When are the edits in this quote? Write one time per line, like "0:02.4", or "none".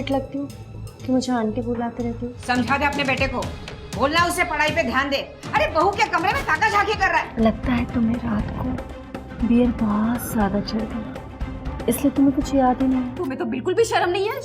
0:02.3
0:07.3
0:13.1